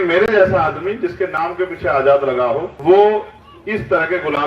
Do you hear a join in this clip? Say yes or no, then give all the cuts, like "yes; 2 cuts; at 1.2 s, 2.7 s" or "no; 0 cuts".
yes; 1 cut; at 2.7 s